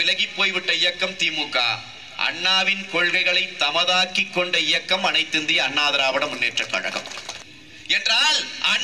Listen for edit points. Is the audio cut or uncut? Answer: cut